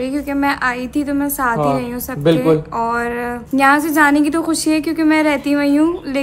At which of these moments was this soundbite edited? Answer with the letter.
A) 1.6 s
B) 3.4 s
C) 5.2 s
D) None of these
B